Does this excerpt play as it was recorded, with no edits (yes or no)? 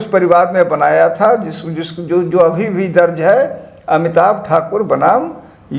yes